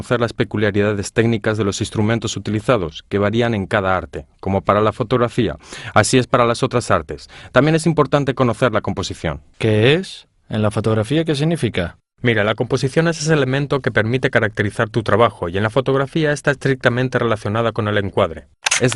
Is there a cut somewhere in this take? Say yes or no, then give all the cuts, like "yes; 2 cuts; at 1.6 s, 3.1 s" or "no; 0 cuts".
yes; 1 cut; at 11.6 s